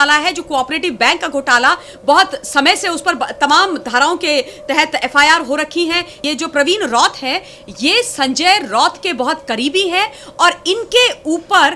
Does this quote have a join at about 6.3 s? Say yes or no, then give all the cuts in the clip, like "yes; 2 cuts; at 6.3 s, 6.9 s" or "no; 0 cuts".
yes; 1 cut; at 6.3 s